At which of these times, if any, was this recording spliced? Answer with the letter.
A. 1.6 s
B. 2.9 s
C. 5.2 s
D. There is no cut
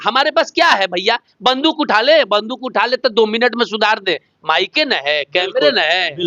D